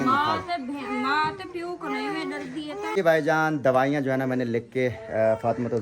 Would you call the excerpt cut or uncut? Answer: cut